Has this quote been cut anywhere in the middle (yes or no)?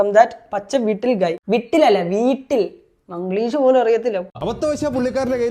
yes